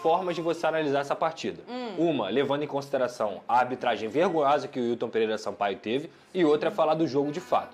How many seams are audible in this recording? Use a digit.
0